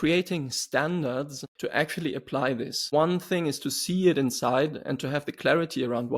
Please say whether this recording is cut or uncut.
cut